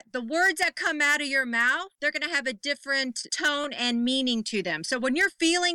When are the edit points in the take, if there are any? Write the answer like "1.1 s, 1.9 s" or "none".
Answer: 1.9 s, 3.3 s